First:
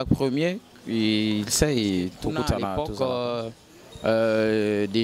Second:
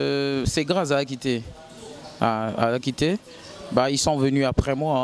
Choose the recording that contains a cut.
first; 1 cut; at 2.7 s

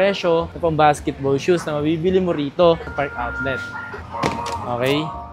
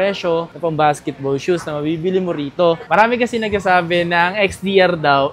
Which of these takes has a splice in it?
second; 1 cut; at 2.8 s

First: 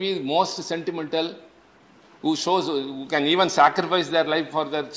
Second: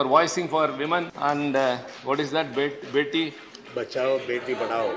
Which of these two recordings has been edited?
second; 1 cut; at 1.1 s

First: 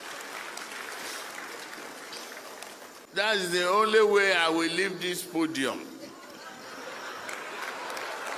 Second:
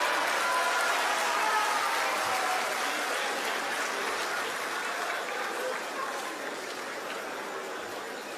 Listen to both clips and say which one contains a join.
first; 1 cut; at 3.0 s

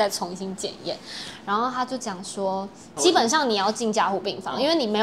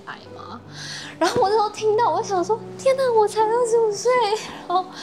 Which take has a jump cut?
first; 1 cut; at 2.8 s

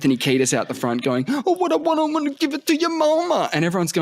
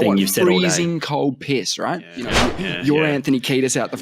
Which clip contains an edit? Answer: second; 1 cut; at 2.3 s

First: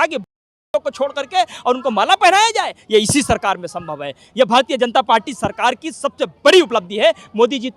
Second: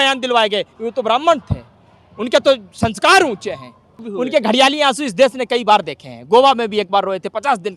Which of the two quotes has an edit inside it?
second; 1 cut; at 4.1 s

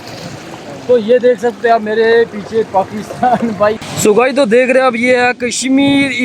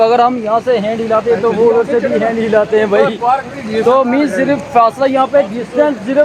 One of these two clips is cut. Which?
first; 1 cut; at 3.7 s

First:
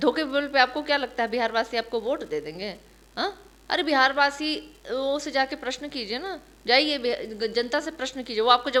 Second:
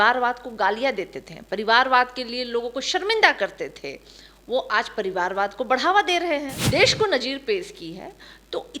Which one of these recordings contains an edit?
second; 1 cut; at 6.5 s

